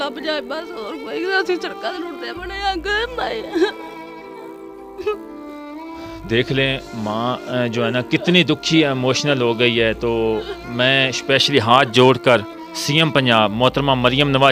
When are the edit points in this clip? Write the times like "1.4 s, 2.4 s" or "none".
none